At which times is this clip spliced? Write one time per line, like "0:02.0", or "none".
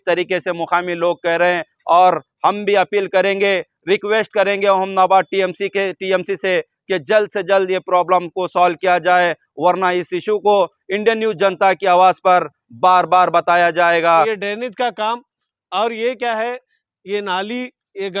0:14.3